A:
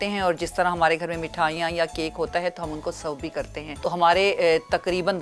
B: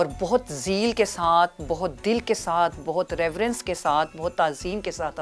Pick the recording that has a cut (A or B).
A